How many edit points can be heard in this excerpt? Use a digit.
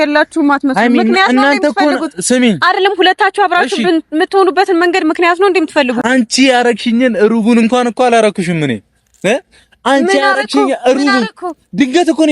1